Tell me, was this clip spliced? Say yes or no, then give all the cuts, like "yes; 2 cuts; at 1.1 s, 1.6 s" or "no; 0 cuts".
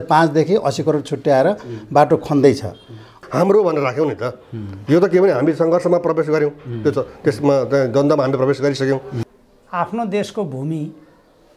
yes; 2 cuts; at 3.2 s, 9.2 s